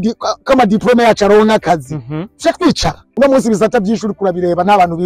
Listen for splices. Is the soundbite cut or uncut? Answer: cut